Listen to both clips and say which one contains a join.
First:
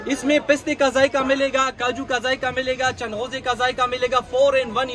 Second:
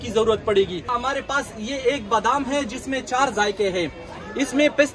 second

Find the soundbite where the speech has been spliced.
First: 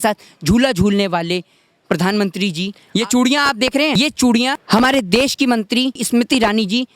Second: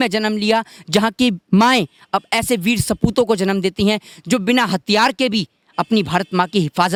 first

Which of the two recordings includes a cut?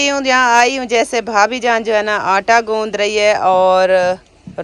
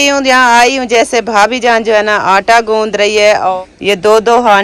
second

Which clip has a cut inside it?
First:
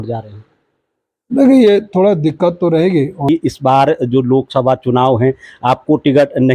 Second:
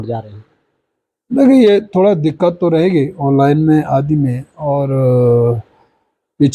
first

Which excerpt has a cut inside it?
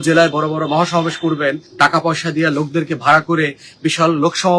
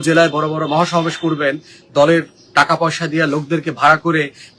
first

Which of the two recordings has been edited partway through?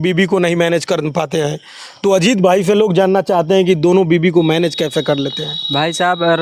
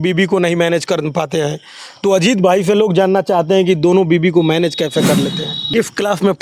second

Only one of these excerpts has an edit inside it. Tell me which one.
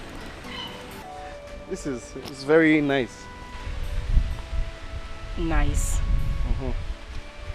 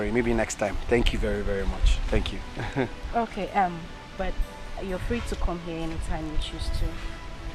first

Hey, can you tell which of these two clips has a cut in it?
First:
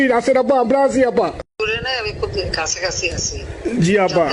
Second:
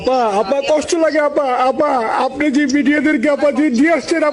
first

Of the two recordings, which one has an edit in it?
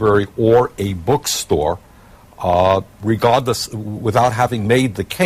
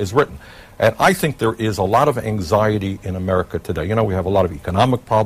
first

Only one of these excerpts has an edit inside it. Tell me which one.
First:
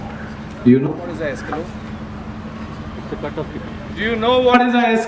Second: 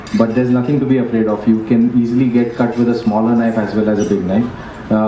second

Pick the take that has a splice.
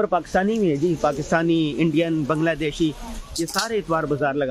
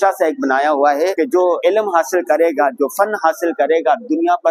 second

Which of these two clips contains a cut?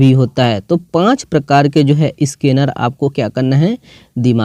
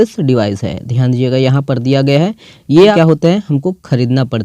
second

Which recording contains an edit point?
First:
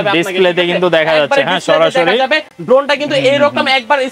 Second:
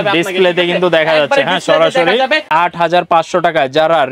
second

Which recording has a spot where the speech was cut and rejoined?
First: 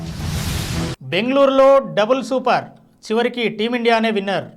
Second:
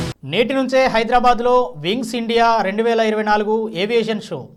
first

